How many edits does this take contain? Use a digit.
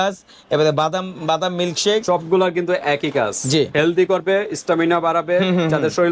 1